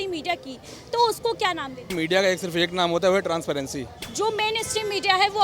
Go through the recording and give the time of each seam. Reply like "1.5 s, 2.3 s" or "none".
1.9 s, 4.0 s